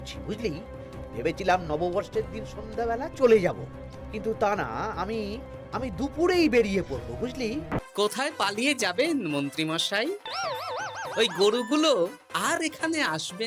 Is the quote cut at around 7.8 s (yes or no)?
yes